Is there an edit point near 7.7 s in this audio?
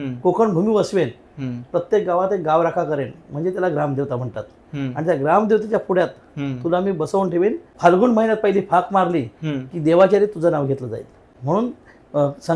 yes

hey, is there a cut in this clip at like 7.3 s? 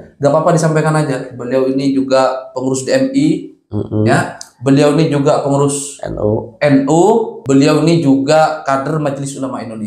yes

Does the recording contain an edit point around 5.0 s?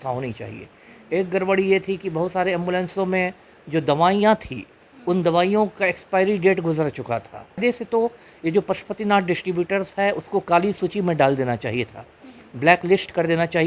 no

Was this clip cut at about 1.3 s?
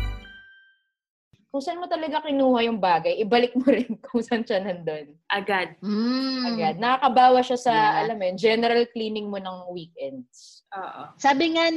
yes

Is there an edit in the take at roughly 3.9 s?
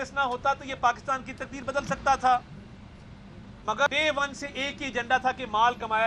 yes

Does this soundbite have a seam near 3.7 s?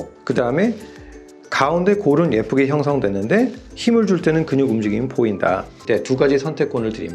no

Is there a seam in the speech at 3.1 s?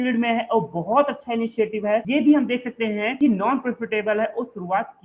yes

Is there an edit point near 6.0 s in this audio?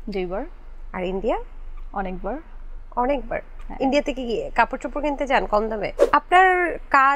yes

